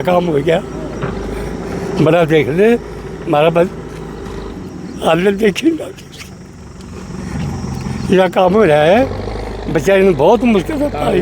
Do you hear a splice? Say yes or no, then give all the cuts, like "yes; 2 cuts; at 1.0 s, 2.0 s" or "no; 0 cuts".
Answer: no; 0 cuts